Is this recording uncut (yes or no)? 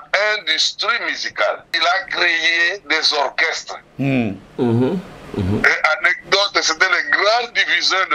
no